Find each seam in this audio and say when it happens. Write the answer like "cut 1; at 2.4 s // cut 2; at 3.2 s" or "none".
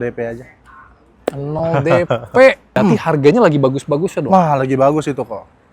cut 1; at 2.7 s